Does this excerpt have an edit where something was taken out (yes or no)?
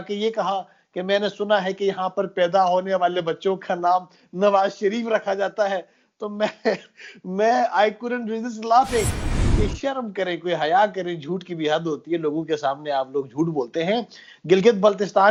no